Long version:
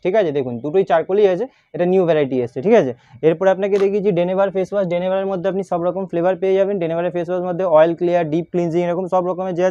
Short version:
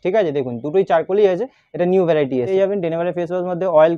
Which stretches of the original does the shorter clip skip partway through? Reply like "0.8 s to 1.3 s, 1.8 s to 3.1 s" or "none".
2.5 s to 6.5 s